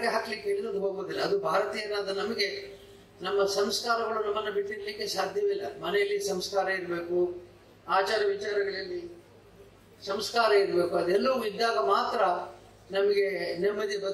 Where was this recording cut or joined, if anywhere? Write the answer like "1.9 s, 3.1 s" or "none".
none